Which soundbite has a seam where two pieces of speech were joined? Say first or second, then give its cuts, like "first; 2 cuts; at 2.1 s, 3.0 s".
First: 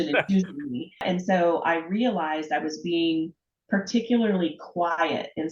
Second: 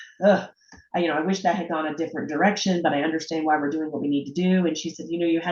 first; 1 cut; at 1.0 s